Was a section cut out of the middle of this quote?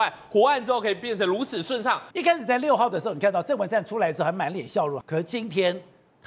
yes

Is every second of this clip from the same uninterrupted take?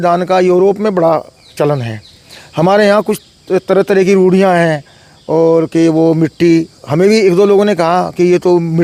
yes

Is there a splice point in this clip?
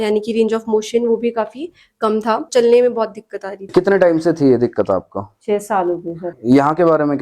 yes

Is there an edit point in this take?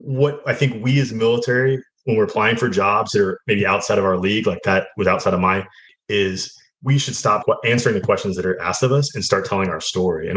yes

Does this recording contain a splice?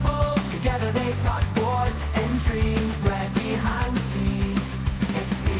no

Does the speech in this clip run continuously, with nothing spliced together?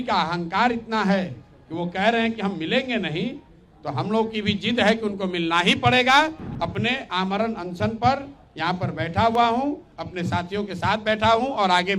no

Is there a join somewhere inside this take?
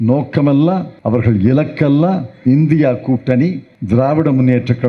yes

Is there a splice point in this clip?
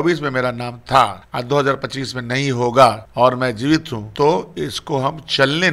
yes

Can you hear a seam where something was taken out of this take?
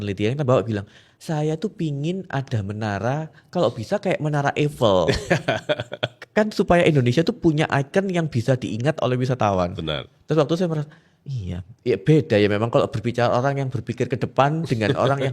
no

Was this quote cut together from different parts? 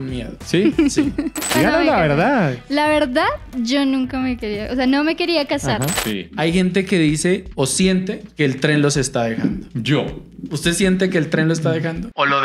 yes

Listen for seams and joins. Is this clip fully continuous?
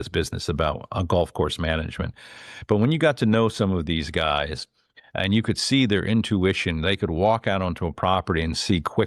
yes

